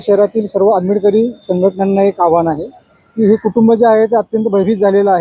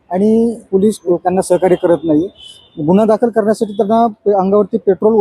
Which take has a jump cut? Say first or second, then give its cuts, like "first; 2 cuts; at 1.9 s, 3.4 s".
second; 1 cut; at 0.9 s